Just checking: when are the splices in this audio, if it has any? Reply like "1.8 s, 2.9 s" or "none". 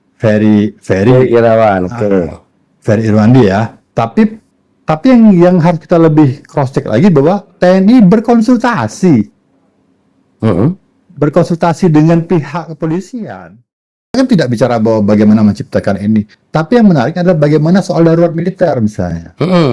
14.2 s